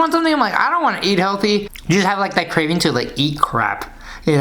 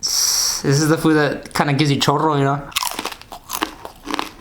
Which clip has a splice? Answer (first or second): second